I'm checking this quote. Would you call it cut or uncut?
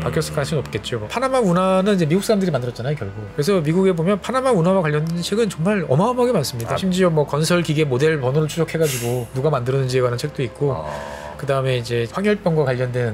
cut